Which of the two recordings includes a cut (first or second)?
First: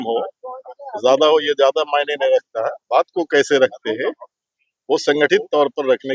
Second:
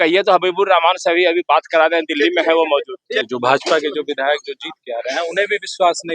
second